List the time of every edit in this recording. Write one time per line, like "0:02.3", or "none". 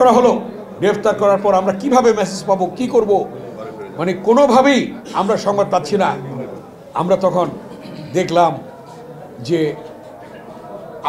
none